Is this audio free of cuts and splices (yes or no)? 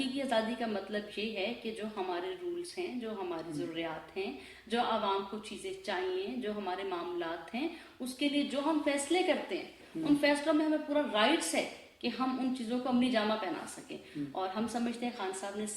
yes